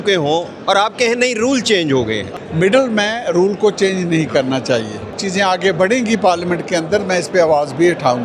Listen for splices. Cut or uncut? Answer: cut